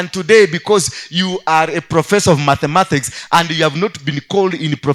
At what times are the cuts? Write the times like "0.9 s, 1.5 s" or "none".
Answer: none